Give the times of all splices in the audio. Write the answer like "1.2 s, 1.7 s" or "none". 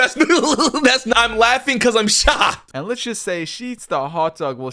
1.1 s, 2.7 s